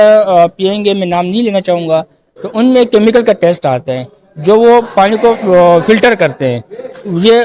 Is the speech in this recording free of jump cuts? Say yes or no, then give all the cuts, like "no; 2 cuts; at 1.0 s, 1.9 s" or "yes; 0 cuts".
yes; 0 cuts